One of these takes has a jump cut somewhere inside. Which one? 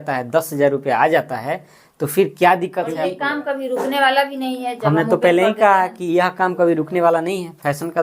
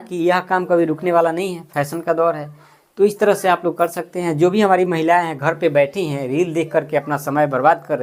first; 1 cut; at 3.1 s

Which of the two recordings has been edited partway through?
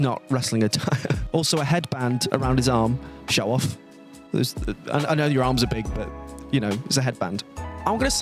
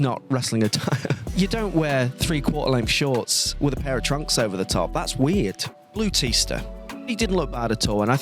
second; 3 cuts; at 1.2 s, 5.7 s, 7.1 s

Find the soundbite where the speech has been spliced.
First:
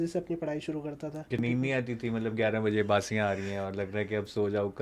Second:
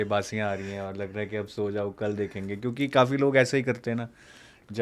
first; 1 cut; at 1.4 s

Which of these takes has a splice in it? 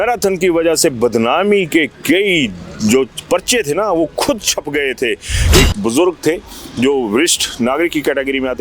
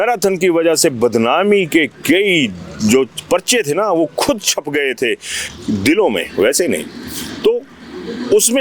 first; 1 cut; at 5.4 s

